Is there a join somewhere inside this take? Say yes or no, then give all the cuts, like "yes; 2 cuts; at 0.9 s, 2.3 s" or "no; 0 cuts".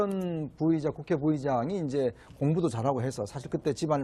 no; 0 cuts